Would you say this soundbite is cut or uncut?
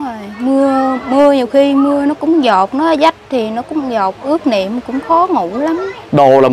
uncut